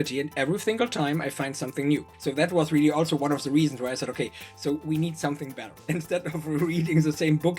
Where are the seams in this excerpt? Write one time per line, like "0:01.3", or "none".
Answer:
0:02.1
0:05.9